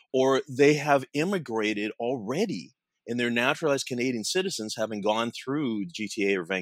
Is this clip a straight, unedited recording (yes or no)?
yes